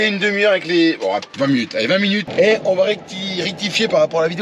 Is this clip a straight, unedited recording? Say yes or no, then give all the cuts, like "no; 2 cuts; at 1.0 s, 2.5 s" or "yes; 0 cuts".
no; 2 cuts; at 1.3 s, 2.3 s